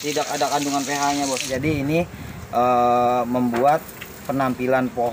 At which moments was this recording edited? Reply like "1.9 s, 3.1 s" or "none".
1.5 s